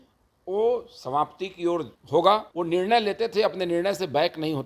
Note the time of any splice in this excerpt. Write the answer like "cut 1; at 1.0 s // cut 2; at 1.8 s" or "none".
cut 1; at 2.0 s // cut 2; at 2.5 s